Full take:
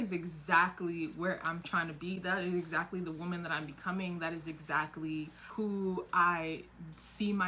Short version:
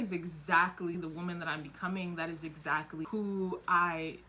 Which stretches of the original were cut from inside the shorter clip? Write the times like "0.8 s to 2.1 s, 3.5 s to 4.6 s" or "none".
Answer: 1.0 s to 3.0 s, 5.1 s to 5.5 s